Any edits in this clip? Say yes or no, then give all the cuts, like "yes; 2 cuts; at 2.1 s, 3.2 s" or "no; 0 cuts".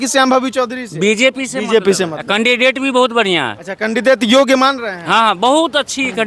no; 0 cuts